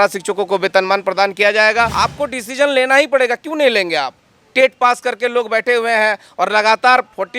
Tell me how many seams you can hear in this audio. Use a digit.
1